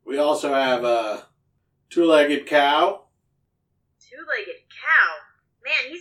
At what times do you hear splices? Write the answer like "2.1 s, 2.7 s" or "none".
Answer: none

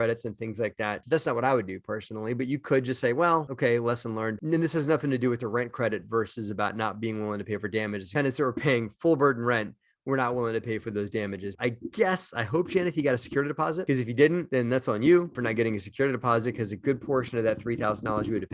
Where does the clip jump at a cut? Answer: none

